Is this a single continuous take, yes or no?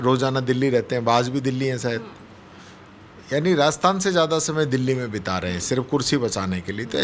yes